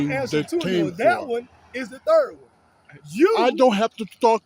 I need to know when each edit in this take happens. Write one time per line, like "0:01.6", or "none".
none